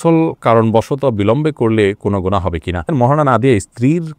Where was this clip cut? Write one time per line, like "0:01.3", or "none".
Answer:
0:02.9